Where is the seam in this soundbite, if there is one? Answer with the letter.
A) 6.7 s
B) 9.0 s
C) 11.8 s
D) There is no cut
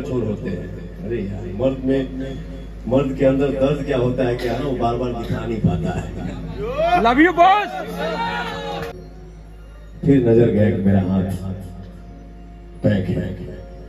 B